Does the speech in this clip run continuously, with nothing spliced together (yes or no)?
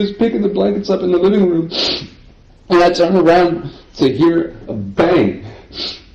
yes